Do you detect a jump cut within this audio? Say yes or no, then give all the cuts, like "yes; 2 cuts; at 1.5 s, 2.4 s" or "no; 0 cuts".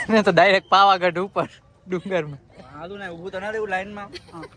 no; 0 cuts